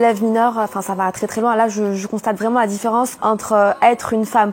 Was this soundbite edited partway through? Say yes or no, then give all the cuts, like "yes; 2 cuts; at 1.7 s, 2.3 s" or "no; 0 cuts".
yes; 1 cut; at 3.2 s